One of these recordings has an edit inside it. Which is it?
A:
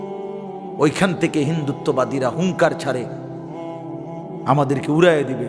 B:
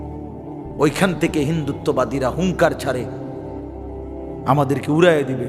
B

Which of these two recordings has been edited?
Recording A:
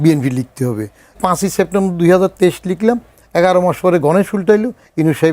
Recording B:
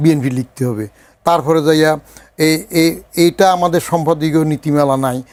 A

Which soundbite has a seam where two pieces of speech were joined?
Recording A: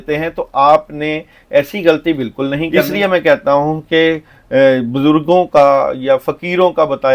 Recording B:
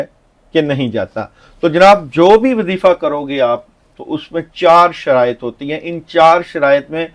A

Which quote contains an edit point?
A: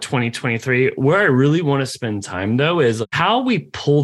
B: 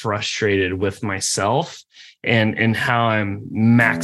A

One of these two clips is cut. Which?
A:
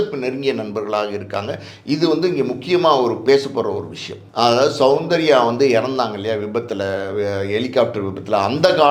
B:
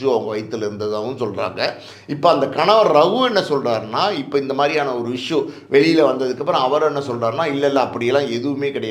A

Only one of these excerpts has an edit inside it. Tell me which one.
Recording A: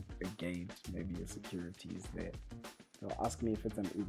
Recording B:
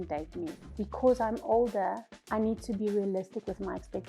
B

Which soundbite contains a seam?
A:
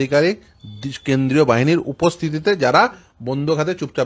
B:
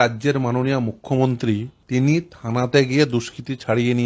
B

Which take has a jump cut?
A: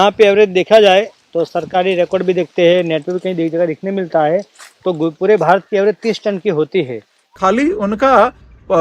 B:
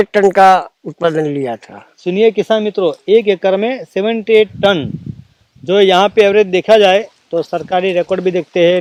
A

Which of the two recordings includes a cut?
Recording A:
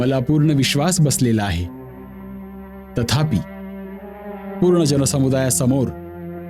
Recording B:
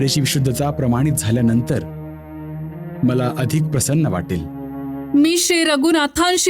B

